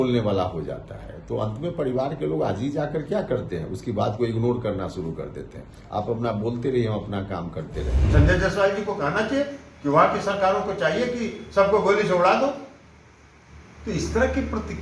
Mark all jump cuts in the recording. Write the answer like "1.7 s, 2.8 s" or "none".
8.0 s